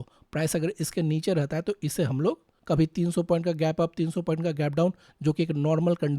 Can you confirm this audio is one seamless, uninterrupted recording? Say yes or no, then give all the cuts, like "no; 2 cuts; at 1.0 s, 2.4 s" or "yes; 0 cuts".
no; 1 cut; at 2.5 s